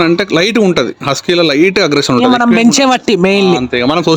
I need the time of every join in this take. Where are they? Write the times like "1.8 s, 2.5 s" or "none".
none

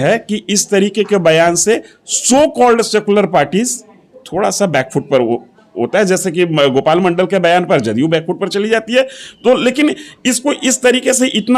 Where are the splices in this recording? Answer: none

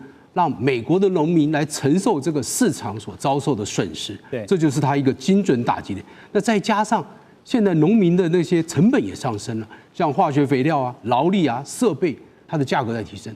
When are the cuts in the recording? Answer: 12.4 s

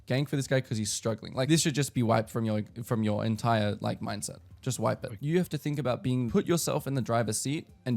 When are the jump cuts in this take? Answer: 1.5 s, 5.1 s, 6.3 s

